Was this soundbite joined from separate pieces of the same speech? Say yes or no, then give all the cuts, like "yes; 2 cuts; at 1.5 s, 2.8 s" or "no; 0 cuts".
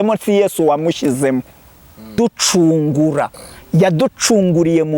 yes; 1 cut; at 2.2 s